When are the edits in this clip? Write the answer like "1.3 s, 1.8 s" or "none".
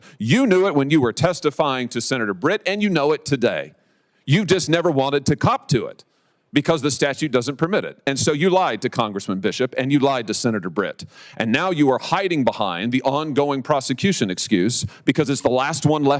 none